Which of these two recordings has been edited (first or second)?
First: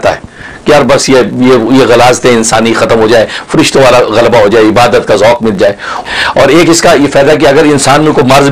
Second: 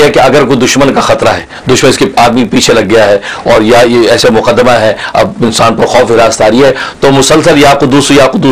first